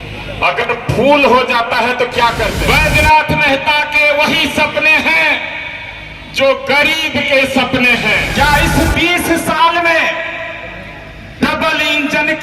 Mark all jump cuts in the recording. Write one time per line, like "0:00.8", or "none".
0:02.6
0:08.3